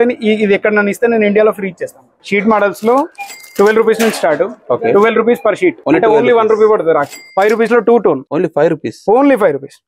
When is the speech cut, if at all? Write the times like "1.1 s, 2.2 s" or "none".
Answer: 2.2 s, 5.8 s, 7.2 s, 8.3 s

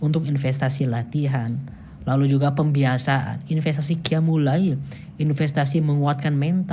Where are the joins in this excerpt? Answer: 1.3 s, 5.2 s

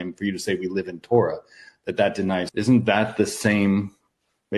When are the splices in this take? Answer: 2.5 s

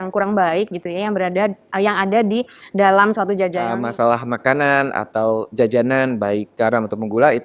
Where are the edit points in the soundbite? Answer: 3.6 s

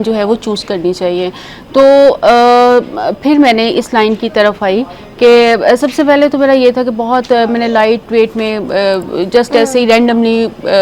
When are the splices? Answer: none

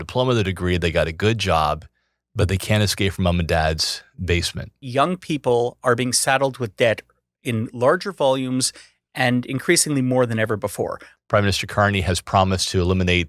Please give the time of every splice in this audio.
4.8 s, 11.0 s

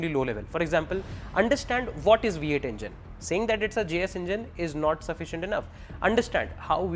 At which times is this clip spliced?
none

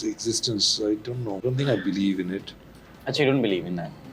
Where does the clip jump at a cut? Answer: 1.4 s

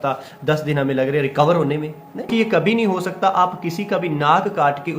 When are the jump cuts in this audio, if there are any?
2.3 s

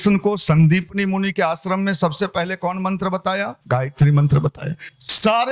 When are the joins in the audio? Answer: 3.6 s

